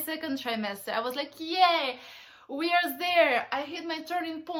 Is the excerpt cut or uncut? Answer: uncut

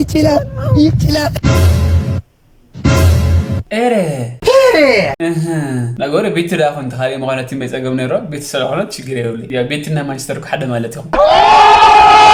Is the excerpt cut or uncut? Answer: uncut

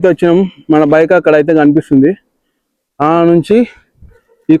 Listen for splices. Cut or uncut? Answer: uncut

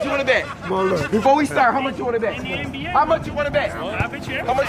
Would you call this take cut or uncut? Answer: uncut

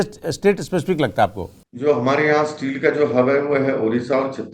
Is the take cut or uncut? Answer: cut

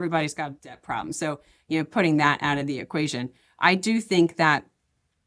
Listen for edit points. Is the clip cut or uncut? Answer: uncut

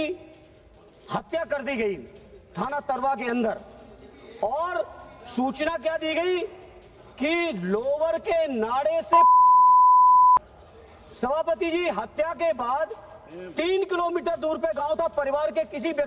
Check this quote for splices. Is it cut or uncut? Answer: uncut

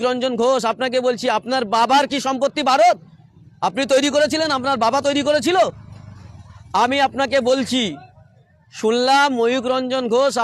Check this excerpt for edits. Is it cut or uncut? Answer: uncut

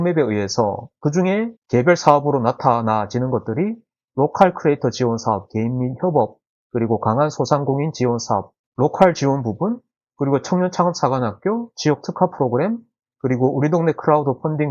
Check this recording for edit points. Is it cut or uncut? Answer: uncut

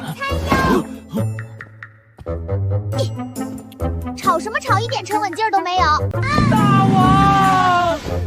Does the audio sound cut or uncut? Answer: cut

